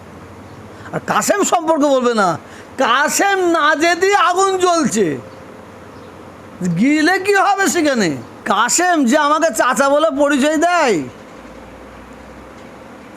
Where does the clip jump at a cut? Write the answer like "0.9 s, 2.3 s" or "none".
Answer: 8.3 s